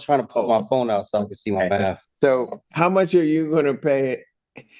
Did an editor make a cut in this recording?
yes; 1 cut; at 2.6 s

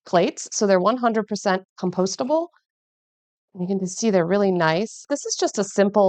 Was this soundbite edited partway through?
yes; 1 cut; at 5.1 s

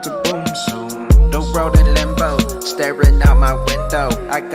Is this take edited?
no; 0 cuts

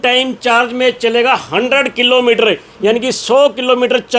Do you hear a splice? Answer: no; 0 cuts

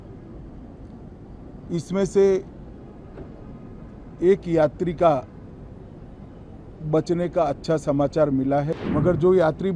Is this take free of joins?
no; 1 cut; at 8.7 s

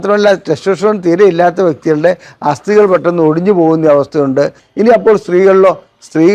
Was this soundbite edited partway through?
yes; 1 cut; at 4.6 s

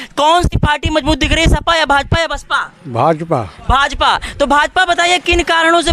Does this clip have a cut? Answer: no; 0 cuts

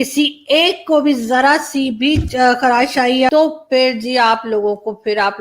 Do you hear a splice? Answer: yes; 1 cut; at 3.3 s

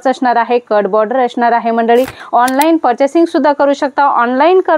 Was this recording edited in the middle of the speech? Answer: yes; 1 cut; at 2.2 s

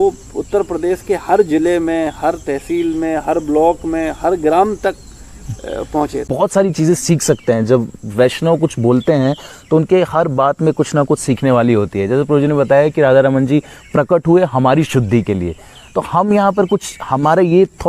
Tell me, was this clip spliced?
yes; 1 cut; at 6.2 s

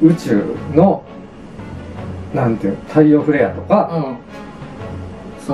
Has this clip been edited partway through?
no; 0 cuts

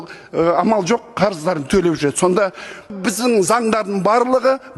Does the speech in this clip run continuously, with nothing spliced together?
no; 1 cut; at 2.9 s

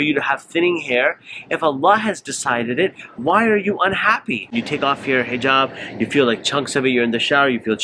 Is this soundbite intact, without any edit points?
no; 1 cut; at 4.5 s

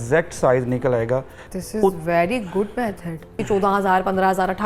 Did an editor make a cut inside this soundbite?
yes; 2 cuts; at 1.4 s, 3.4 s

